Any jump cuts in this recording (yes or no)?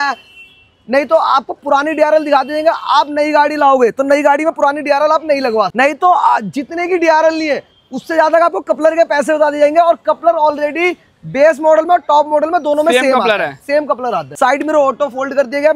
yes